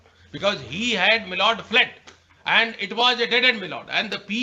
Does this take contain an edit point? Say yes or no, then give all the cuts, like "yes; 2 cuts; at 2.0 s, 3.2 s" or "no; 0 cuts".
no; 0 cuts